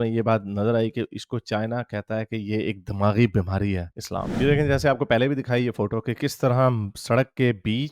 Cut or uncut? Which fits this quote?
cut